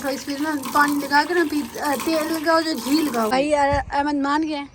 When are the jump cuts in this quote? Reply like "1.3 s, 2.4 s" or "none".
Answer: 3.3 s